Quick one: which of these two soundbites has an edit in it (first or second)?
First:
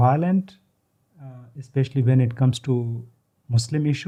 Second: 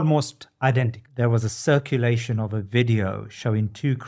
second